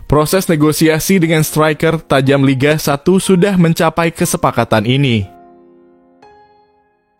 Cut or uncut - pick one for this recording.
cut